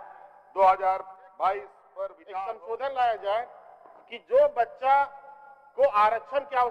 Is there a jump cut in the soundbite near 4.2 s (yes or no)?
no